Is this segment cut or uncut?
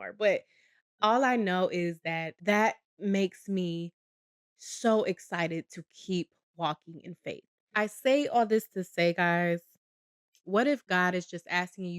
cut